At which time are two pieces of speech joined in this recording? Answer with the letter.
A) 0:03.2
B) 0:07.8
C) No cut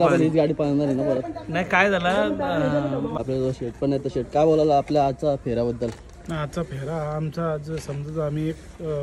A